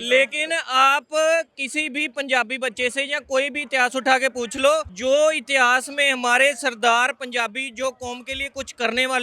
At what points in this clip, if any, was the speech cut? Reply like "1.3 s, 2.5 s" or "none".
4.9 s